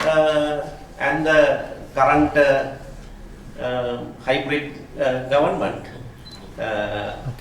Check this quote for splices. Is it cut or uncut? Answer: uncut